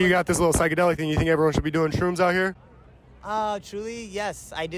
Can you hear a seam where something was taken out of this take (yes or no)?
no